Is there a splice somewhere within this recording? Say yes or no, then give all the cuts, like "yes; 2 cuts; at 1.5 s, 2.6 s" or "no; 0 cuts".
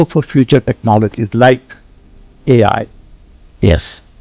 no; 0 cuts